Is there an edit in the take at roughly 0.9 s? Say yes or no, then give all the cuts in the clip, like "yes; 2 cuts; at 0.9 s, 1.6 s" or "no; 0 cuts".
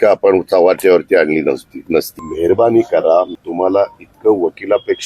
no; 2 cuts; at 2.2 s, 3.4 s